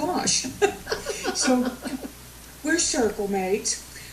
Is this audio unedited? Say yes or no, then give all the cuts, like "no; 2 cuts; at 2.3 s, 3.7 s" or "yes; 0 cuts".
no; 1 cut; at 1.8 s